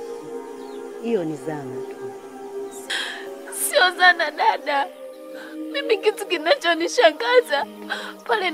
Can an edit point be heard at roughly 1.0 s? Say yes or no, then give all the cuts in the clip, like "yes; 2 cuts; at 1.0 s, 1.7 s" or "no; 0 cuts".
yes; 1 cut; at 1.0 s